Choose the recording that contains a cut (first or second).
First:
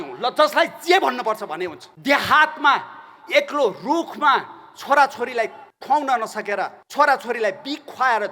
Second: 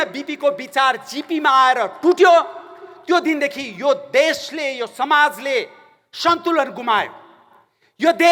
first